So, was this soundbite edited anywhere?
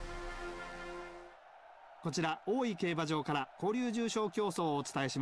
yes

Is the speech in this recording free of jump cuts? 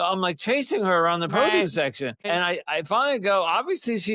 no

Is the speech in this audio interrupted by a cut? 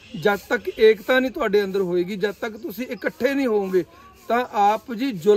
no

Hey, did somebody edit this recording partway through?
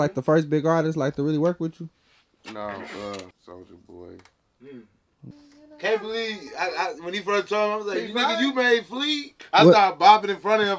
yes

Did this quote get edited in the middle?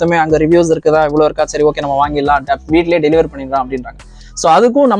no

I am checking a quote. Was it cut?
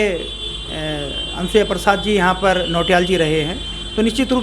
no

